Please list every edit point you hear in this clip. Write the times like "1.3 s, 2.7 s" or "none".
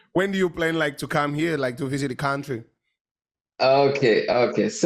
none